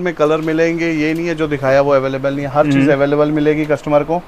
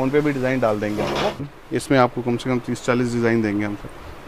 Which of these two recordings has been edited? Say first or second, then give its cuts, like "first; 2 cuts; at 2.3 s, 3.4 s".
second; 1 cut; at 1.5 s